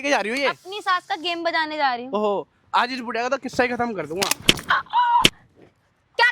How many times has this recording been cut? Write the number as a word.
zero